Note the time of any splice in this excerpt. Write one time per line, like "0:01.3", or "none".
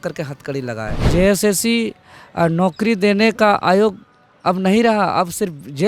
0:01.1

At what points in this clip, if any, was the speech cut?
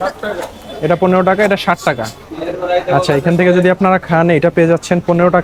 none

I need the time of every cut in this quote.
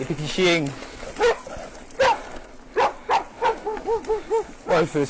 none

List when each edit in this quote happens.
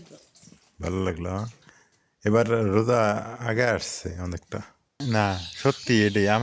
0:04.9

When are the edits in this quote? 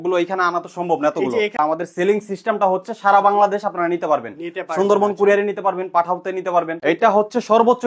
0:01.6
0:06.7

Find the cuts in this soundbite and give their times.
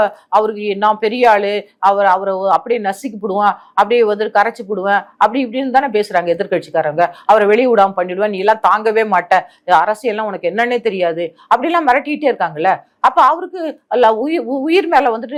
none

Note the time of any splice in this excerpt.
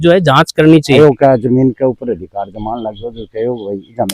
0:01.0

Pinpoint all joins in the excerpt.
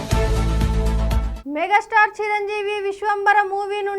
0:01.3

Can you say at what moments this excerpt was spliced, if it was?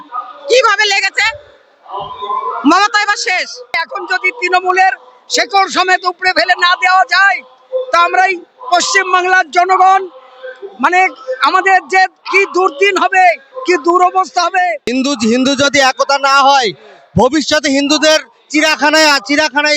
0:03.7
0:14.8

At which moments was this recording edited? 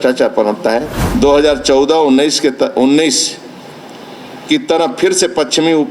0:01.0

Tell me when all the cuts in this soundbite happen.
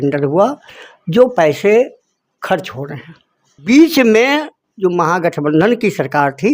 0:03.6

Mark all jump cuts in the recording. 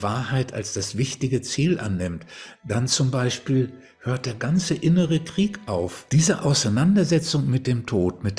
0:06.0

